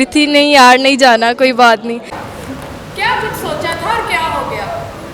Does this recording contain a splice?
yes; 1 cut; at 2.0 s

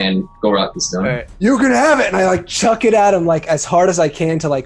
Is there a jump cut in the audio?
yes; 1 cut; at 1.3 s

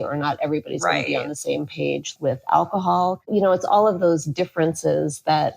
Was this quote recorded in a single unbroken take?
no; 1 cut; at 3.2 s

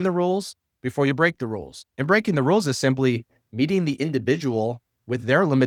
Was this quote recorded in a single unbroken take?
yes; 0 cuts

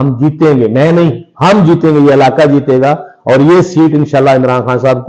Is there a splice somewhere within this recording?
no; 0 cuts

